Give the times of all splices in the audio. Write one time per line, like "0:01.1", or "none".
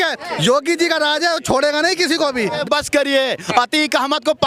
0:02.6